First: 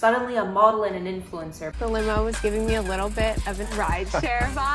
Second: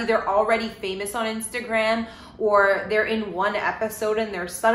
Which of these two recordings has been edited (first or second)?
first